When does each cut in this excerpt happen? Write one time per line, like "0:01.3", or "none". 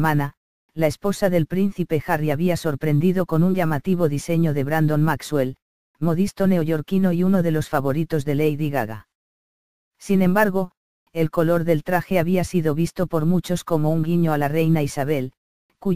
0:12.0